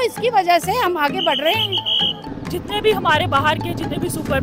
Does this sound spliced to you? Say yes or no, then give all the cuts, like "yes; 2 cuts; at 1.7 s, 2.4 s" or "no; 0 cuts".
yes; 1 cut; at 2.3 s